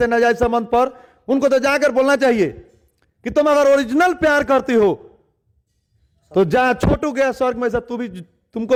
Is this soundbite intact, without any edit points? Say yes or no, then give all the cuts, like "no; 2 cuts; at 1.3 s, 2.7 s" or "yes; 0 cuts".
yes; 0 cuts